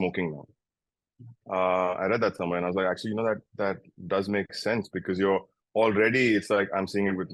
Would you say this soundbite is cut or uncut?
uncut